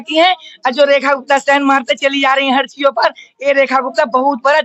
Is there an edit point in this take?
no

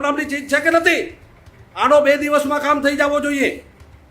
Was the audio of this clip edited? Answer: no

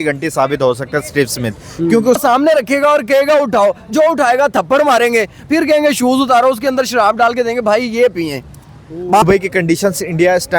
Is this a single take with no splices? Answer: no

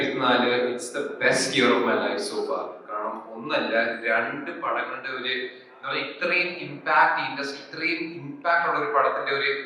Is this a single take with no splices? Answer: yes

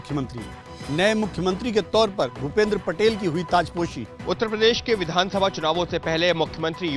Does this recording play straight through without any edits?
no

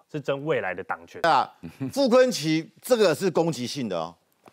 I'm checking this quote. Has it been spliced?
yes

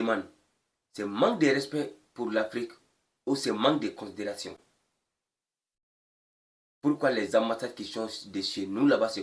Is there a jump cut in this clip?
no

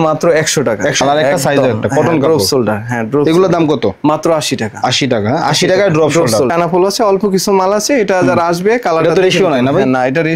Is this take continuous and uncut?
no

